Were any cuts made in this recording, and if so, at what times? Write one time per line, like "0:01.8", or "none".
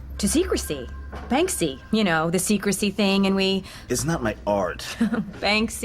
0:03.8